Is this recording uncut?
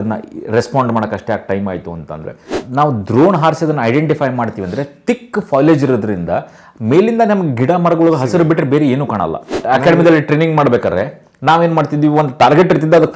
no; 2 cuts; at 2.6 s, 9.6 s

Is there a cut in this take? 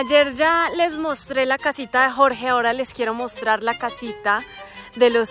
no; 0 cuts

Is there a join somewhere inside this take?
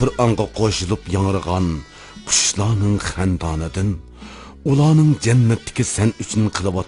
yes; 1 cut; at 3.1 s

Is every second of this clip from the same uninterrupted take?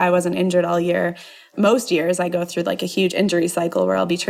no; 1 cut; at 1.5 s

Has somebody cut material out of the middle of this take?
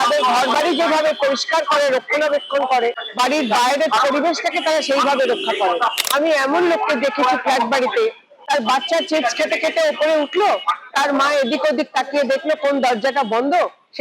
yes; 1 cut; at 3.0 s

